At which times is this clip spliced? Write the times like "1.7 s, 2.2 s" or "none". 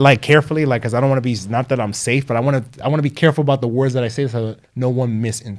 4.6 s